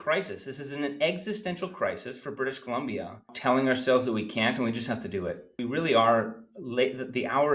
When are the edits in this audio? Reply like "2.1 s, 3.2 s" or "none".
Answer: 3.3 s, 5.6 s

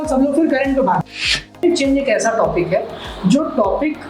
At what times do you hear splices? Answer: 1.6 s

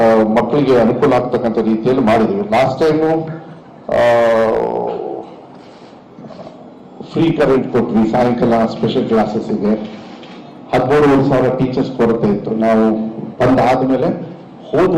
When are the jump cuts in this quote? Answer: 1.2 s

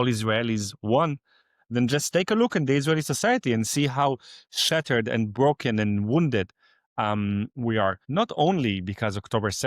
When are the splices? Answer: 8.0 s

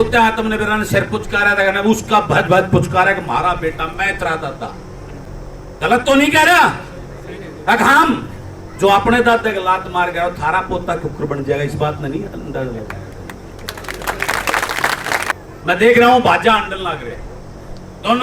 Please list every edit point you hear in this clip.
5.3 s, 15.4 s

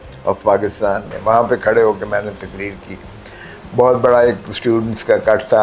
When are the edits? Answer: 1.1 s

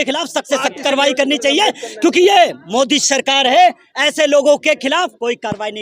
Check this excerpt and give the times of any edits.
none

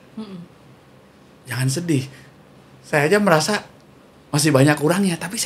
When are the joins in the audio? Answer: none

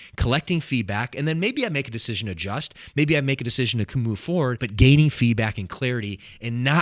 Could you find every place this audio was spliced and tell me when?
4.6 s

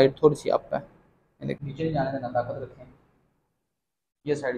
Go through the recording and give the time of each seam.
1.7 s

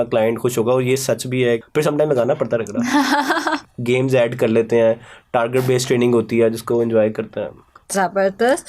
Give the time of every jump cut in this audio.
1.6 s, 3.7 s

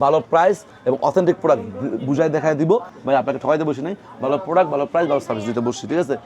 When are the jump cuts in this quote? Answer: 2.9 s

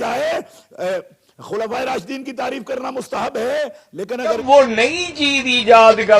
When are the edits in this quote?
4.4 s

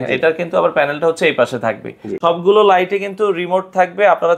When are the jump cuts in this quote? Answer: 2.1 s

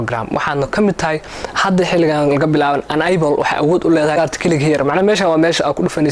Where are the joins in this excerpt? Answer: 4.1 s

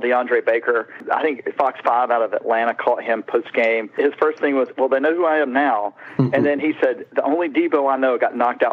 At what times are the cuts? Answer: 0.9 s, 4.0 s

